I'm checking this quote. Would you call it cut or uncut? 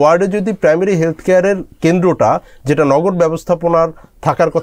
uncut